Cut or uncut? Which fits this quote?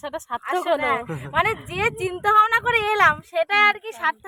uncut